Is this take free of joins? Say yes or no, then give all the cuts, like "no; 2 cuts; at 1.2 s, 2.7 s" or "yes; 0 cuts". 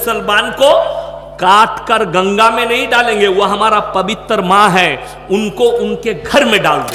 yes; 0 cuts